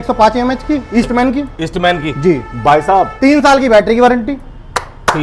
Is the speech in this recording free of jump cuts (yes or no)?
yes